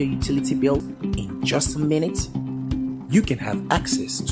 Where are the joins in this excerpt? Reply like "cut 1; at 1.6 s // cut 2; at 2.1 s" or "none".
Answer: cut 1; at 0.9 s